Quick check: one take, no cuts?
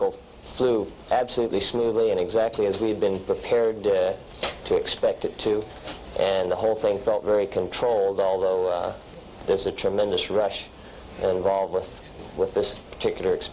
yes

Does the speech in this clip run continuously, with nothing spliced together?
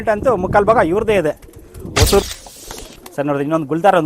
no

